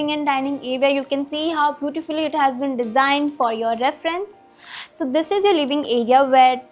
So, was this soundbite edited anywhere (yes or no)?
no